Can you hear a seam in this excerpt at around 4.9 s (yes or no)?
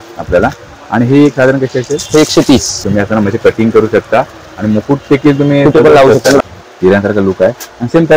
no